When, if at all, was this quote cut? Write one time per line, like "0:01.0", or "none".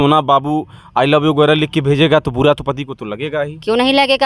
none